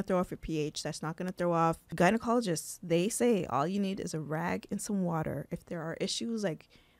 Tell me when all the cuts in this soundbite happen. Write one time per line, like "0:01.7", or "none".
0:01.8